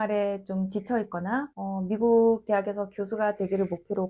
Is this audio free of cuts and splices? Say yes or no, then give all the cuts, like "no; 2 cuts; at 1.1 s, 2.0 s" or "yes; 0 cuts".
no; 1 cut; at 1.5 s